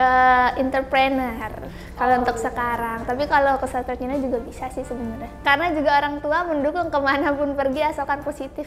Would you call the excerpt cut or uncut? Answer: uncut